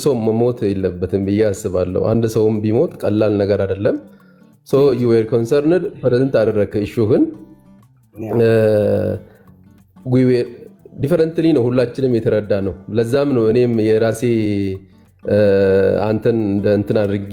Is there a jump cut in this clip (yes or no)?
no